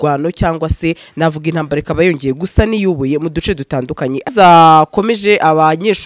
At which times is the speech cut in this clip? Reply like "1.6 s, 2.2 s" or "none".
4.3 s